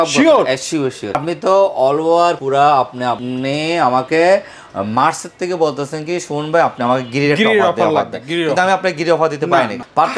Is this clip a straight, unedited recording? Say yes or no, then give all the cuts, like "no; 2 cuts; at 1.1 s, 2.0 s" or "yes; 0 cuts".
yes; 0 cuts